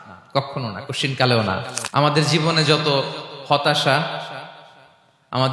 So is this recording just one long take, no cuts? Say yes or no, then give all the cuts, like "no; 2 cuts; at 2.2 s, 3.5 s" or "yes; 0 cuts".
no; 1 cut; at 1.8 s